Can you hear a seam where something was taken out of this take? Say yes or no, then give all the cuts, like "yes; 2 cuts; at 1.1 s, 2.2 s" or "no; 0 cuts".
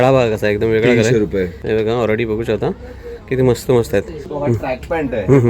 yes; 2 cuts; at 1.6 s, 4.2 s